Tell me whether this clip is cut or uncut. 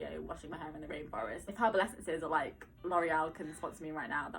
cut